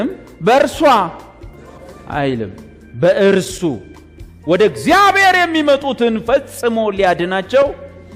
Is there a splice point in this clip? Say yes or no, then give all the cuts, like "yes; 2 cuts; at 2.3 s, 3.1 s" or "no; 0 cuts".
no; 0 cuts